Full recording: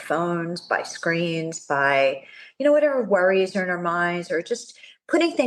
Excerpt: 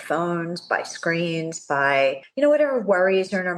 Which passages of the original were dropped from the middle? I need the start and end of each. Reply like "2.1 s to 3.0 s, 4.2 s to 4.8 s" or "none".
2.2 s to 2.5 s

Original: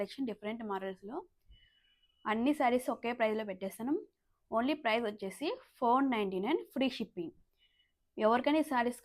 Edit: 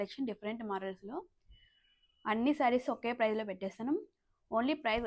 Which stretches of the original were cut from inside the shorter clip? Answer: none

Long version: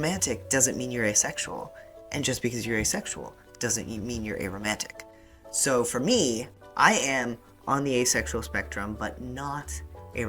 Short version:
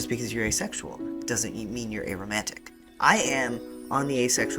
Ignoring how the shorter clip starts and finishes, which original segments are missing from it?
5.1 s to 6.6 s

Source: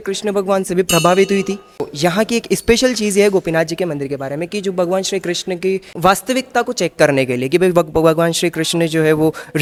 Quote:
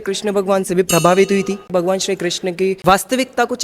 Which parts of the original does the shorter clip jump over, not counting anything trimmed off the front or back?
1.7 s to 4.7 s, 5.8 s to 6.0 s

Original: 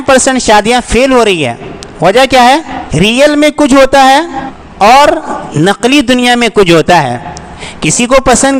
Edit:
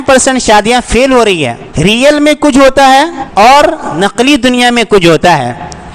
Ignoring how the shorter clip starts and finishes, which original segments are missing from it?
1.6 s to 2.8 s, 4.4 s to 4.6 s, 5.4 s to 5.6 s

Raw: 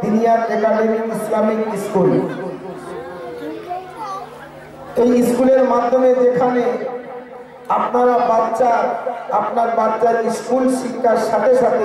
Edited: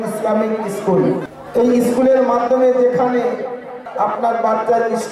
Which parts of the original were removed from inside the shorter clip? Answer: 2.4 s to 4.8 s, 7.2 s to 9.1 s

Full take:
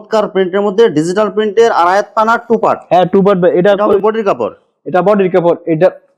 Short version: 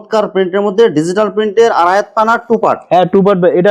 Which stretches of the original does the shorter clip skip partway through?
none

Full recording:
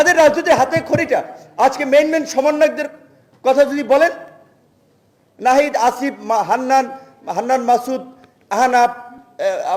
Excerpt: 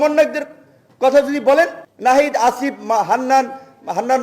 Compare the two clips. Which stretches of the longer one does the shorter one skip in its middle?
4.3 s to 5.2 s

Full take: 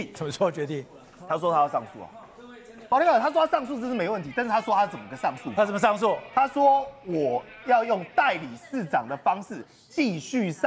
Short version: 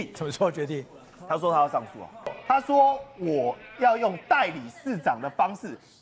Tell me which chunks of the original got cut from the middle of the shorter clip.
2.4 s to 6.2 s

